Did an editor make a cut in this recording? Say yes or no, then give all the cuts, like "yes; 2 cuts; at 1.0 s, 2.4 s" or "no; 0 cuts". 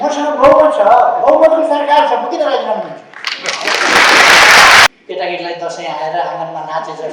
yes; 1 cut; at 4.9 s